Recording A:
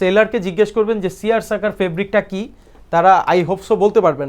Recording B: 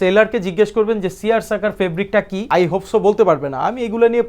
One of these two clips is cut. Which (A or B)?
B